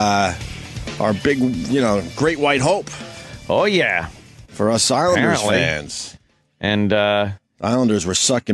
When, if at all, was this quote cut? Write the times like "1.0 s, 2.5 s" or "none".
4.6 s

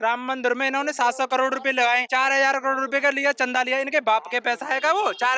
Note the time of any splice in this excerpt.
2.1 s

